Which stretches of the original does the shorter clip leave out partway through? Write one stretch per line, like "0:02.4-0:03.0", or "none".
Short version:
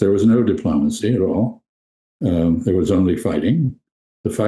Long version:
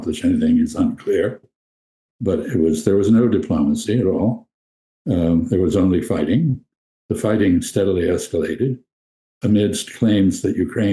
none